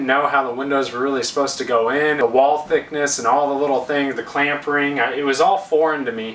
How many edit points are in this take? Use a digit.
1